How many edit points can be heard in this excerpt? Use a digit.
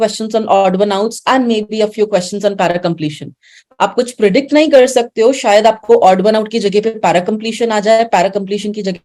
0